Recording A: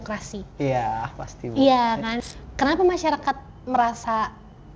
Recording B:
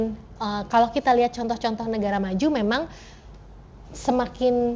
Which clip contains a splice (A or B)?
A